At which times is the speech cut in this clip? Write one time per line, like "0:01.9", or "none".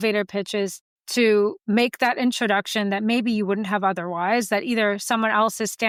none